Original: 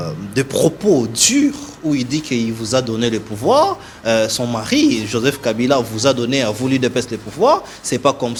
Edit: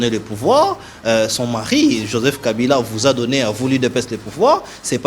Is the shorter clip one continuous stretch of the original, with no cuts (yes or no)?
yes